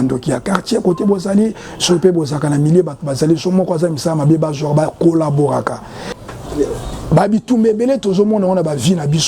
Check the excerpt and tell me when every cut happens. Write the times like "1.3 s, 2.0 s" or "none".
6.2 s